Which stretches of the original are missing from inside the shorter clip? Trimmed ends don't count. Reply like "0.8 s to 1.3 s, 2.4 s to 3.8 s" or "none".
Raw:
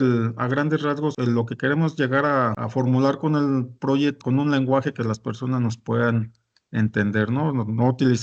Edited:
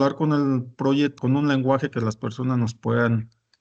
none